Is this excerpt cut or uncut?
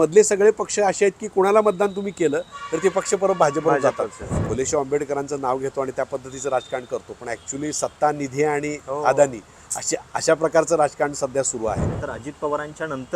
cut